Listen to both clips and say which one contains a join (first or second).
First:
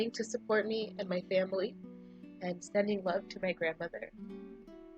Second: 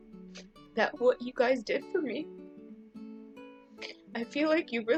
first